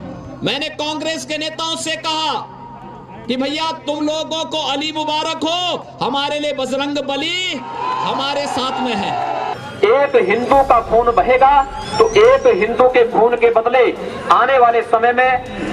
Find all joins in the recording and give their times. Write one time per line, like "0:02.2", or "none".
0:09.6